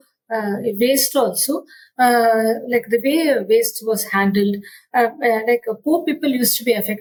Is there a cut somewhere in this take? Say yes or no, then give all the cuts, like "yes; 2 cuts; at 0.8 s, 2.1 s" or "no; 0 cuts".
no; 0 cuts